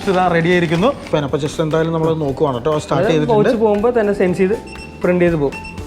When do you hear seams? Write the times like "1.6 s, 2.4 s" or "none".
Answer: 1.1 s